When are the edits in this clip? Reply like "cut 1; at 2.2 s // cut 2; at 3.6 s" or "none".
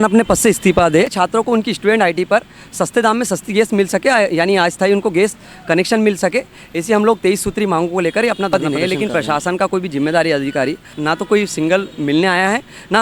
cut 1; at 1.1 s // cut 2; at 8.5 s // cut 3; at 10.9 s